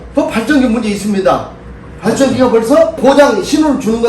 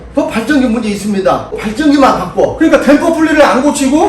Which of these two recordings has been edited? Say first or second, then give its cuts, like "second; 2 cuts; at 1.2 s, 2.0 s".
second; 1 cut; at 1.8 s